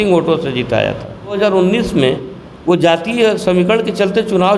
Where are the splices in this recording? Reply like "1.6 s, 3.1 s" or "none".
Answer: 1.4 s